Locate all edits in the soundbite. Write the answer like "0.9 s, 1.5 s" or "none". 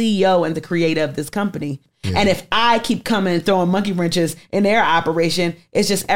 1.9 s